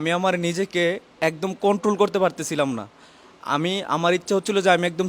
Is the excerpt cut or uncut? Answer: uncut